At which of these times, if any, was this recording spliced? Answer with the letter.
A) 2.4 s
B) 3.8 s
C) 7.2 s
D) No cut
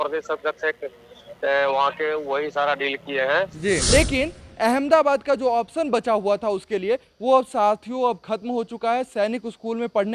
B